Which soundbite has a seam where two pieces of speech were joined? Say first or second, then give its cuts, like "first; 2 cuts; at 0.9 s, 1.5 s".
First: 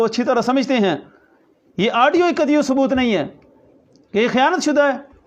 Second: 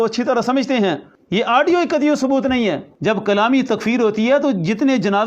second; 2 cuts; at 1.1 s, 2.9 s